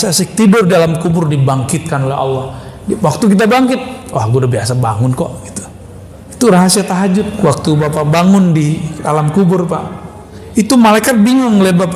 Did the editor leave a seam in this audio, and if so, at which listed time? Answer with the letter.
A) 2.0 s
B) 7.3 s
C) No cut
B